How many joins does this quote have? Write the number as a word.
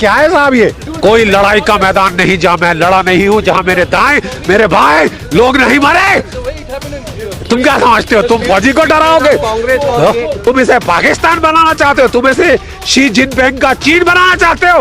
two